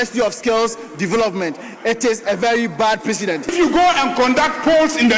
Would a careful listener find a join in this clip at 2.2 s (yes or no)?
no